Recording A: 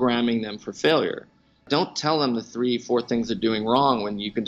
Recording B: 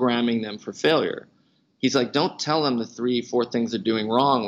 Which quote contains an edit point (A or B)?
A